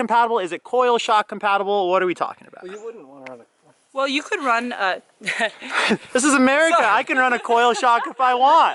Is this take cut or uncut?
uncut